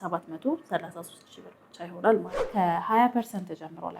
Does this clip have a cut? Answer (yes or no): yes